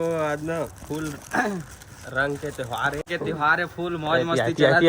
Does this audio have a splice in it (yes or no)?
yes